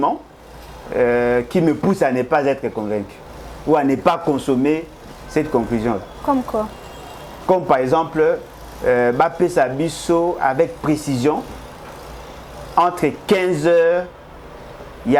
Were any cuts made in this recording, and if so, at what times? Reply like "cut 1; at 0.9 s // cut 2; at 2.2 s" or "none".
none